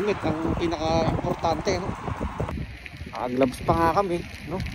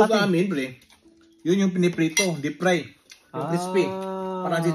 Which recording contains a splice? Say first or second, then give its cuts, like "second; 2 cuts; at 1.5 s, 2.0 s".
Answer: first; 1 cut; at 2.5 s